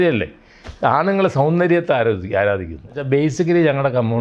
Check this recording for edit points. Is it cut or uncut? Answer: cut